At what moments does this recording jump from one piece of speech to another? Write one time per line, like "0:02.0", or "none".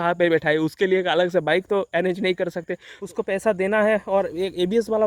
0:02.9